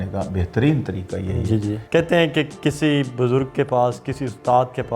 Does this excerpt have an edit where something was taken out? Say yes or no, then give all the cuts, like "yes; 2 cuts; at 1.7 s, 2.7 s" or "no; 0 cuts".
yes; 1 cut; at 1.8 s